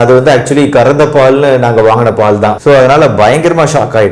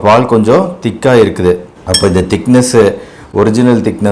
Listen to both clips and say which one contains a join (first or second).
first